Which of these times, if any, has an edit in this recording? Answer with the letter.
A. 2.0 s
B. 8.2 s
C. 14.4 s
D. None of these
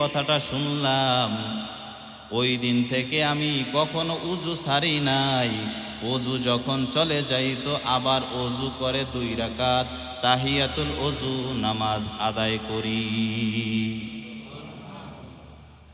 D